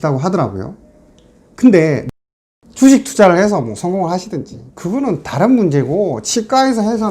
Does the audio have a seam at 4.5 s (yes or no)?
no